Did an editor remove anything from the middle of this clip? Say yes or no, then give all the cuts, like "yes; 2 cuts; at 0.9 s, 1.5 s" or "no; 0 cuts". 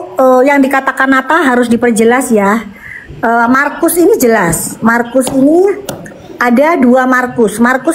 no; 0 cuts